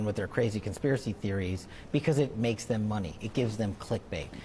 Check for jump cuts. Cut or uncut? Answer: cut